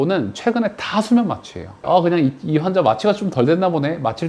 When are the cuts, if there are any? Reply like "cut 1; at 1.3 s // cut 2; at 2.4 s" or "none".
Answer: cut 1; at 1.9 s